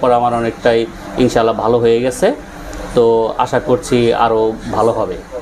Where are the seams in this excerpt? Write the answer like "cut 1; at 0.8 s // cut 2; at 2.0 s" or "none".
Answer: none